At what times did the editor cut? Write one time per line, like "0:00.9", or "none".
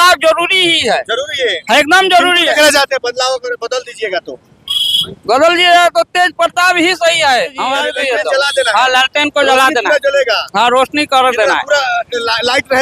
0:07.9